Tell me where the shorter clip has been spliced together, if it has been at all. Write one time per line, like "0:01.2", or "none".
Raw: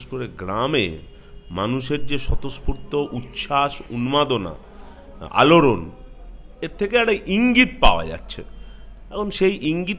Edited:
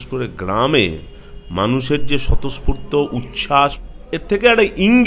0:03.8